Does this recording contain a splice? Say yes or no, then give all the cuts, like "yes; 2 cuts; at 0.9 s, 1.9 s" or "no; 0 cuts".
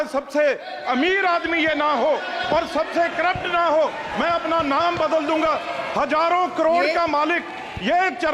no; 0 cuts